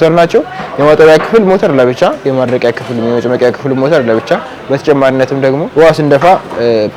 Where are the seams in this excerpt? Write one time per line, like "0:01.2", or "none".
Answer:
0:05.7